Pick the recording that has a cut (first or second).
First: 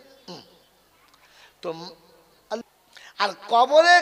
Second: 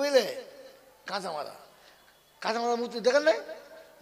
first